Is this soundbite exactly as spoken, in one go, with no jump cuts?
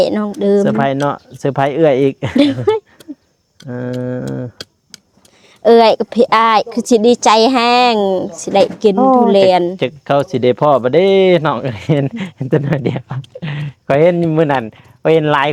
yes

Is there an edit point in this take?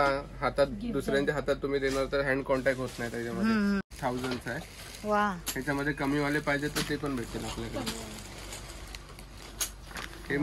yes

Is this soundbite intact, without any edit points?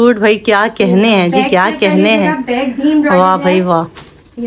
yes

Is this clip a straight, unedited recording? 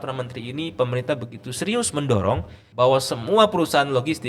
no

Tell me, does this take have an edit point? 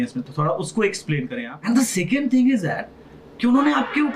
yes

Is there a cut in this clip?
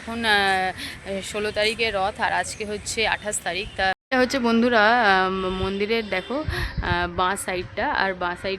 yes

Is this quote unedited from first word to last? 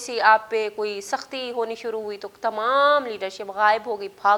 yes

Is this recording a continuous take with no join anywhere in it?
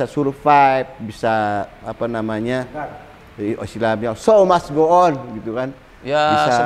yes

